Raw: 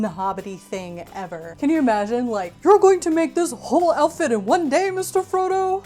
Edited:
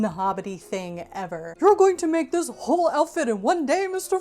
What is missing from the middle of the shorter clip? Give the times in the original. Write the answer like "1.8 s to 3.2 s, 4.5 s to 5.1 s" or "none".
1.5 s to 2.5 s